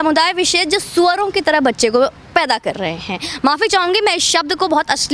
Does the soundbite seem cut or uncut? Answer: uncut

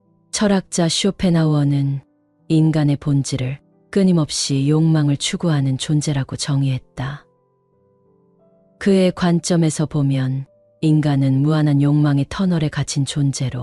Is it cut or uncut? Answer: cut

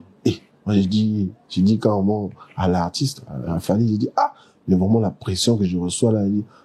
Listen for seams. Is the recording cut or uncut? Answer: uncut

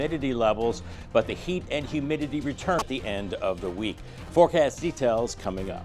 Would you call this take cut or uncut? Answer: cut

